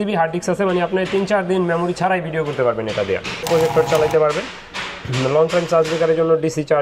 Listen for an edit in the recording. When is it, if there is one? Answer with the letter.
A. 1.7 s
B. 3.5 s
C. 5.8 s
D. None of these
B